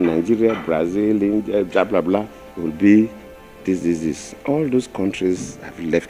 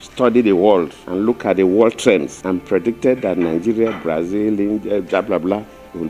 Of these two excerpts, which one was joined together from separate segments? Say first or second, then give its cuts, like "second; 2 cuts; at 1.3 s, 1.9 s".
second; 2 cuts; at 1.0 s, 2.4 s